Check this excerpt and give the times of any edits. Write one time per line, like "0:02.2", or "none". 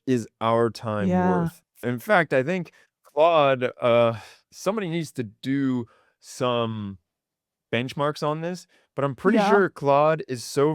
0:01.8